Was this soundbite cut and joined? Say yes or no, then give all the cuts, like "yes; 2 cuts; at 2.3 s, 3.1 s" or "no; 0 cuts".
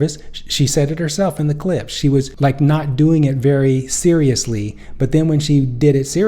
yes; 1 cut; at 2.3 s